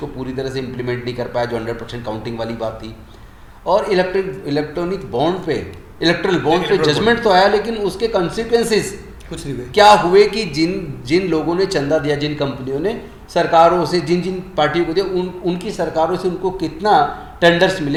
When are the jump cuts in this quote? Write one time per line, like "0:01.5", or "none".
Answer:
none